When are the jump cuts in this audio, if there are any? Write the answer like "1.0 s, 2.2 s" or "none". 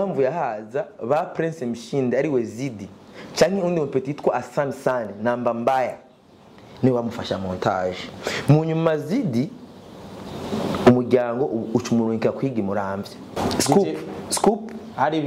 13.4 s